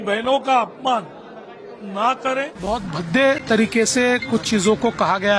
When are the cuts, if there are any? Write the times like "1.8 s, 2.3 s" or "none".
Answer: 2.5 s